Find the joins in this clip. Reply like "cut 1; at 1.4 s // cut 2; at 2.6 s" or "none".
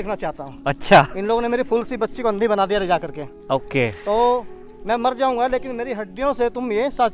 none